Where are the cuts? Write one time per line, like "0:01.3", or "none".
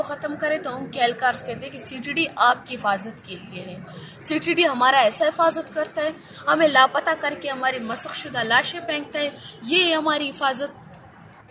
none